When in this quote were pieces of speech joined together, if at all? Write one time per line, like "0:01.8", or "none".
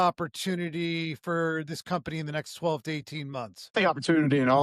0:03.6